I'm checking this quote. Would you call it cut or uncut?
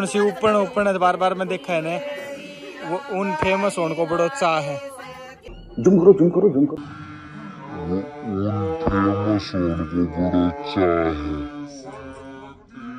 uncut